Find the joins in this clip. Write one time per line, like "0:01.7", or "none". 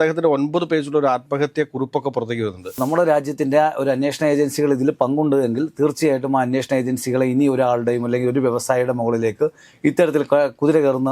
0:02.8